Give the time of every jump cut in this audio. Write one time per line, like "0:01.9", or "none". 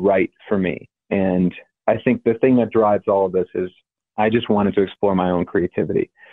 0:00.9
0:01.7